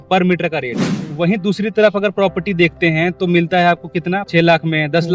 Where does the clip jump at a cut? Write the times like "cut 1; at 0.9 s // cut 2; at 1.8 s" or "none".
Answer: cut 1; at 0.9 s // cut 2; at 4.2 s